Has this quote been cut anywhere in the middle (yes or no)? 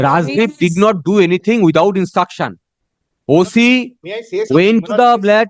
no